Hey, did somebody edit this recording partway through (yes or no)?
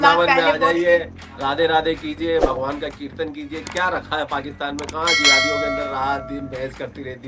no